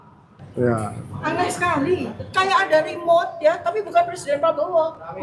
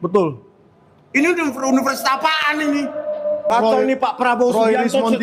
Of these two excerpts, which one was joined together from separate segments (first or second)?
second